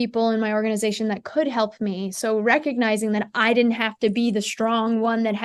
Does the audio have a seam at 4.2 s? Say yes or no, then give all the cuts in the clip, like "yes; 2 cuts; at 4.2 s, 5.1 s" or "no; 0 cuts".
no; 0 cuts